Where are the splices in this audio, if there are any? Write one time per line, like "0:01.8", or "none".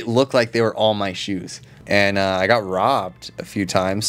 0:01.8